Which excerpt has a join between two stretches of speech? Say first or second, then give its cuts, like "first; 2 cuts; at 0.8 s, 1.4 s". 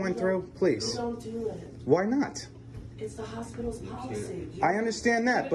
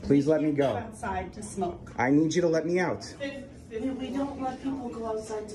second; 1 cut; at 2.2 s